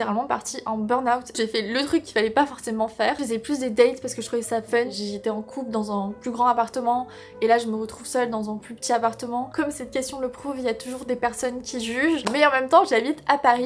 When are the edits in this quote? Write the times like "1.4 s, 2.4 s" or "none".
1.4 s, 3.2 s, 4.9 s, 9.5 s, 12.3 s